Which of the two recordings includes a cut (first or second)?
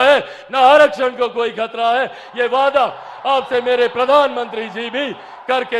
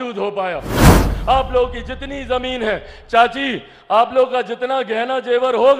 second